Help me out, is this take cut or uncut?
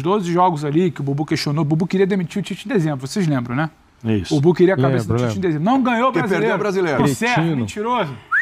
uncut